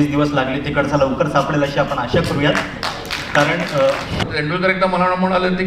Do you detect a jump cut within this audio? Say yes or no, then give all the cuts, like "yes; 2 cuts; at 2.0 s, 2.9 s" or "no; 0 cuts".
yes; 1 cut; at 4.2 s